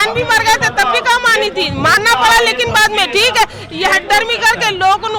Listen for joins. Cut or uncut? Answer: uncut